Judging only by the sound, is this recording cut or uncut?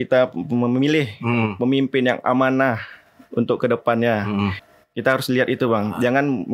cut